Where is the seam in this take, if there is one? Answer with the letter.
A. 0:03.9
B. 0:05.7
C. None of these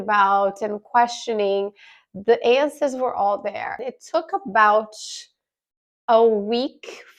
A